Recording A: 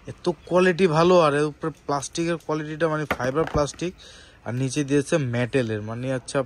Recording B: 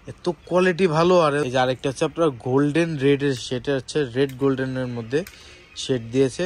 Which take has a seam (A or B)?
B